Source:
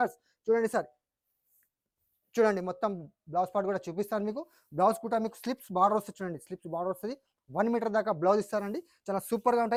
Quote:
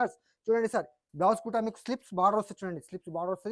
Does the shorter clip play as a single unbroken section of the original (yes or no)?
no